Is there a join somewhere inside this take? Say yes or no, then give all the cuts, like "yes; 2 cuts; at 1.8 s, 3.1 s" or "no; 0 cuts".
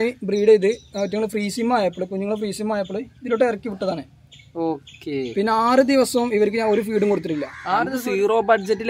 yes; 1 cut; at 7.5 s